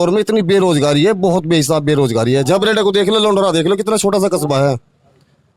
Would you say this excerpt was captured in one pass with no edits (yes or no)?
yes